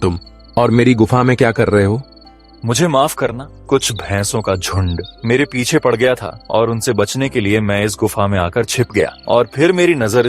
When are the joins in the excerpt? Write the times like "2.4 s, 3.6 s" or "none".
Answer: 3.5 s, 5.1 s, 6.3 s, 9.2 s